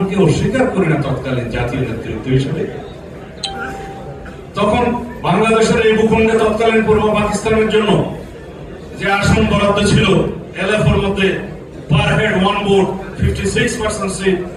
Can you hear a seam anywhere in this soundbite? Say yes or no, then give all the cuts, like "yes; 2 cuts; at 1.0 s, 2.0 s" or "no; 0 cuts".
no; 0 cuts